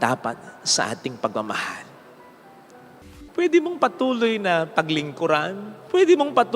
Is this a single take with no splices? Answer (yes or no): no